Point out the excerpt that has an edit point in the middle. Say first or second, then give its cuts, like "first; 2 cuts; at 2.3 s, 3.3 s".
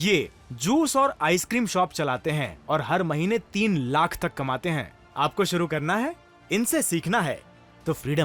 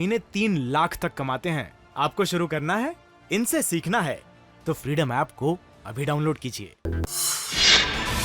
second; 1 cut; at 6.8 s